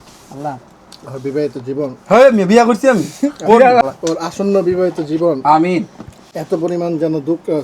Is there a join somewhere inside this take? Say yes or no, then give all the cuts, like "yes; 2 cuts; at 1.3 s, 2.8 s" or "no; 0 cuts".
yes; 1 cut; at 3.8 s